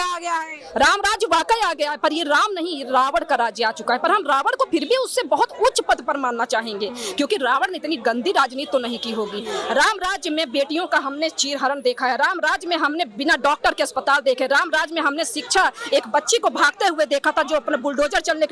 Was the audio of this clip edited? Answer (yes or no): no